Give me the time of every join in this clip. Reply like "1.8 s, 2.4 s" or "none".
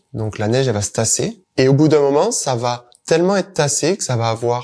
1.4 s